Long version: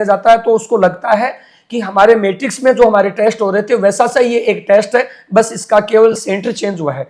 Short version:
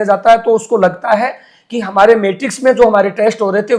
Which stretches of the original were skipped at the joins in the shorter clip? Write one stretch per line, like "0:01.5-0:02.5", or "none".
none